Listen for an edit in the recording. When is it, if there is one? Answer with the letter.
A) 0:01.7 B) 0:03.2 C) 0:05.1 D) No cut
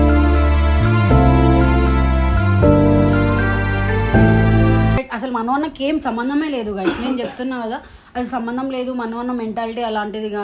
C